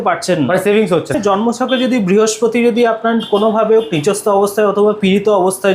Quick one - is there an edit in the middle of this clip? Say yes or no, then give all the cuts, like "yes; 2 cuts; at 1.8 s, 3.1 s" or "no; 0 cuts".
yes; 1 cut; at 1.2 s